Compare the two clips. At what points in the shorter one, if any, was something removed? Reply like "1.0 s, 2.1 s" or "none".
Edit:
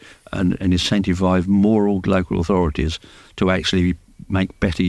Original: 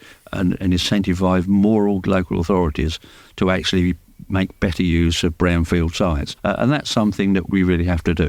none

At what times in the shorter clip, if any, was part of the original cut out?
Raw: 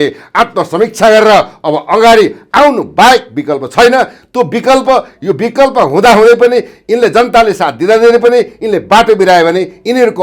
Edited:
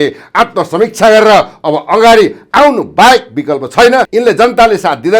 4.1 s

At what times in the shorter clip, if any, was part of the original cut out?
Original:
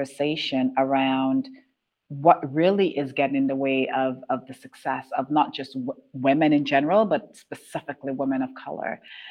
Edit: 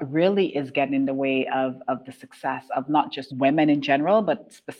3.2 s

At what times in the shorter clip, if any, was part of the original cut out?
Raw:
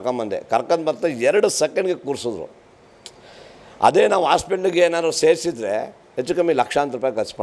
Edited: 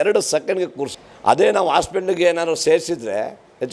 1.0 s

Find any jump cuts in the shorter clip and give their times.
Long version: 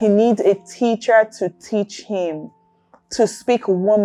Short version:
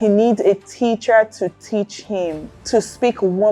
2.5 s

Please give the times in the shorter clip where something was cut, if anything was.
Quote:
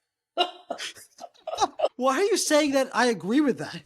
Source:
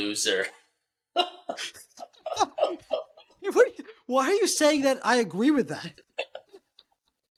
1.9 s

